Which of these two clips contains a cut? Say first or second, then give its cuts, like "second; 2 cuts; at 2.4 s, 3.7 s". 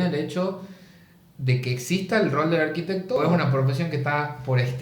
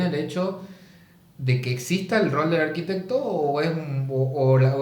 first; 1 cut; at 3.2 s